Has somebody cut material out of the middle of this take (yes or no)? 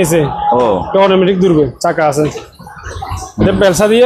no